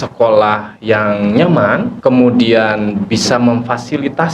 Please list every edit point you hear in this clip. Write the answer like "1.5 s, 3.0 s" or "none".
1.9 s

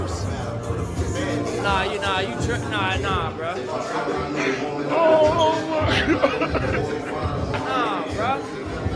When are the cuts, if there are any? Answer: none

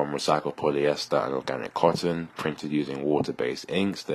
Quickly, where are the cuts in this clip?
none

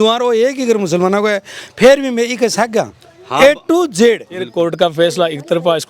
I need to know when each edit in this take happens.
4.5 s

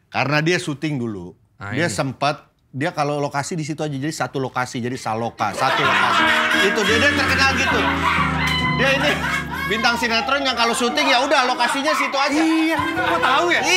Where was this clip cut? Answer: none

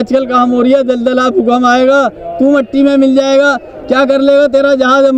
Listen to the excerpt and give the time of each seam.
none

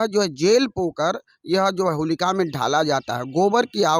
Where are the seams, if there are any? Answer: none

